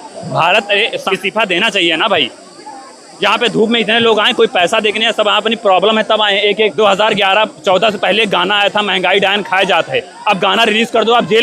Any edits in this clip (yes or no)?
yes